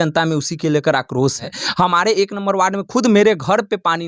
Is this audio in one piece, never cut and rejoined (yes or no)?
no